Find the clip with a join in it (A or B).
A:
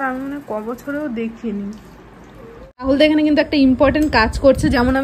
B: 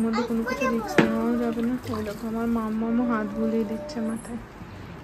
A